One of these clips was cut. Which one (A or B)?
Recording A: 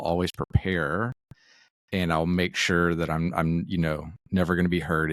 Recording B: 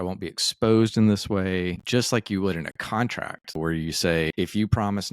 B